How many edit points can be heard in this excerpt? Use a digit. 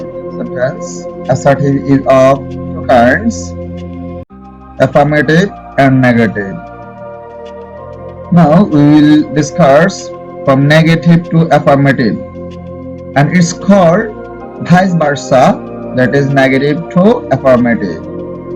4